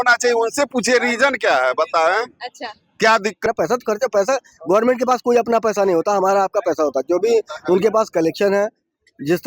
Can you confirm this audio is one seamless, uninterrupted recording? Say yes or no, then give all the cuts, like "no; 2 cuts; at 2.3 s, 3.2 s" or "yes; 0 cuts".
no; 1 cut; at 3.5 s